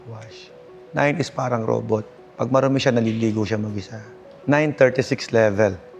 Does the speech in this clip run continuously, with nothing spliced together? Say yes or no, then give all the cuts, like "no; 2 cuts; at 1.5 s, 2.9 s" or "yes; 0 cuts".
no; 1 cut; at 4.4 s